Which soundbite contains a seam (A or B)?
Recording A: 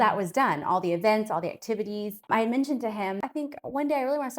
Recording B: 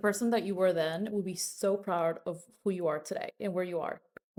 A